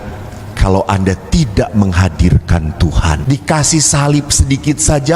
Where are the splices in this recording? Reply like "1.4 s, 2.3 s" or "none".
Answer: 3.2 s